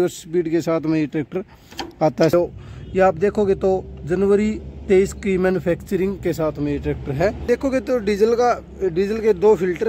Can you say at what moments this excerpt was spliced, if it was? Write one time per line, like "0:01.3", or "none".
0:02.3
0:07.4